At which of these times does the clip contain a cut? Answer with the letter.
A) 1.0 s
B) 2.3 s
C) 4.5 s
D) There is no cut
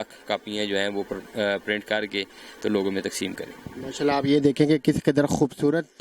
D